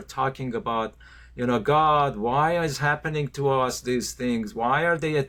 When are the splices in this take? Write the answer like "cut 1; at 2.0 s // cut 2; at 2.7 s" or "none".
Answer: none